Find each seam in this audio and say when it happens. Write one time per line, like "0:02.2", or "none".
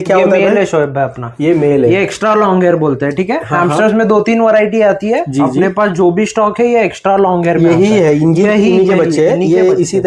none